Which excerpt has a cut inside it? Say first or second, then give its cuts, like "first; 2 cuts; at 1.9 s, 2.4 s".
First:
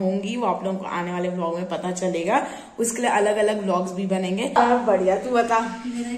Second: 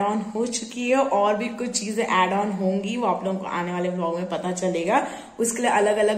first; 1 cut; at 4.6 s